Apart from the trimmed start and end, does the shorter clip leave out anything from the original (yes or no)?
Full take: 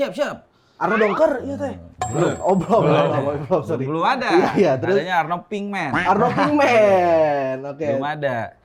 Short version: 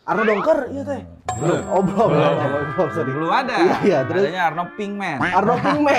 no